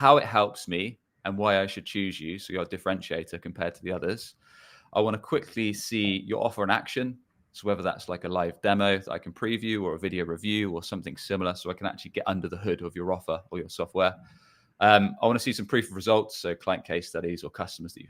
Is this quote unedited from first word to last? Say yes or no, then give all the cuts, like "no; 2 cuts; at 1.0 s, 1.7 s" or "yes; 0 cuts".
yes; 0 cuts